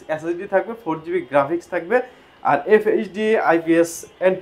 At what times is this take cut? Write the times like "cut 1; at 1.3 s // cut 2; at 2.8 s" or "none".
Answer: none